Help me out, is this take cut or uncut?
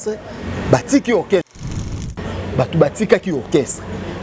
cut